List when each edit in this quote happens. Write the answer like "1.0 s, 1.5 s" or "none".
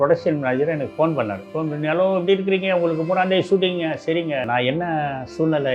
1.4 s, 4.4 s